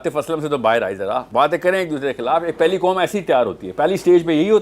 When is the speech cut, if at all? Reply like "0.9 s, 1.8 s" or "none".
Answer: 1.3 s